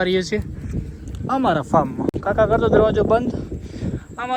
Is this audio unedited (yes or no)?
yes